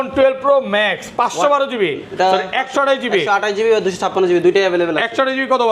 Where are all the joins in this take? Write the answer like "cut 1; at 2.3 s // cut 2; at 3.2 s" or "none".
none